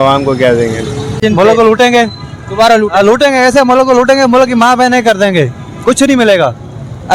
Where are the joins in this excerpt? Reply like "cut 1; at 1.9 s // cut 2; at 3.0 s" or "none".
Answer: cut 1; at 1.1 s